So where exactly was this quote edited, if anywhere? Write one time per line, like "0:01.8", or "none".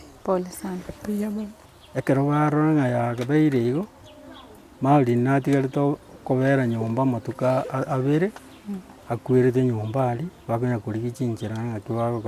0:01.6